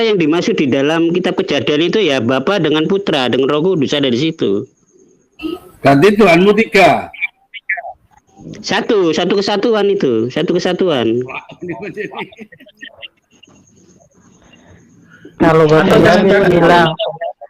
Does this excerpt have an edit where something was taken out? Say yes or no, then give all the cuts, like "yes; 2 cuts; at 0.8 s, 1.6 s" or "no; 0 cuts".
no; 0 cuts